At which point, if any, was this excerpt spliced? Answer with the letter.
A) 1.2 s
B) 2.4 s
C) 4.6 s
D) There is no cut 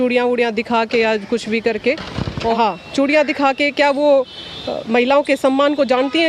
B